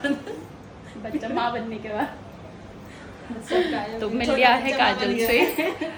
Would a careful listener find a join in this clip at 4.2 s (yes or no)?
no